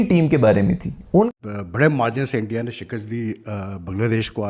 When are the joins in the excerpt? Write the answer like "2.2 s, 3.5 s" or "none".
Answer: 1.3 s